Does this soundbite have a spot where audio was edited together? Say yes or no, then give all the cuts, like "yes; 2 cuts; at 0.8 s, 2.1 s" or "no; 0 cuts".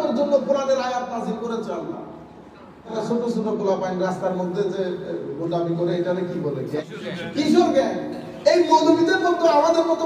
yes; 2 cuts; at 2.9 s, 6.9 s